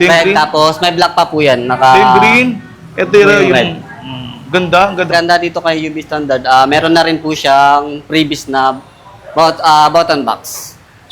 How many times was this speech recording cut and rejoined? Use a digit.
1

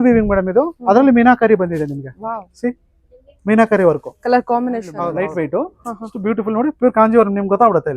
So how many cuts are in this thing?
1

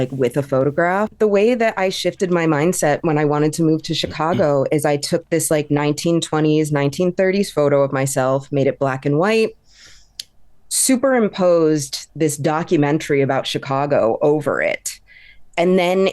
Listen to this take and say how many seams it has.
1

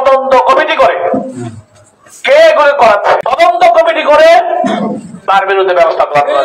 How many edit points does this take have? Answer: 1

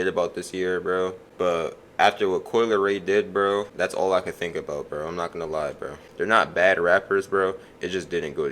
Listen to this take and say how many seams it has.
3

